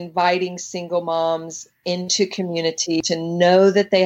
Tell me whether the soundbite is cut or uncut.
cut